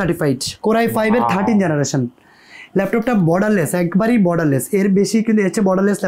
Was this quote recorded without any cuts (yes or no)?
yes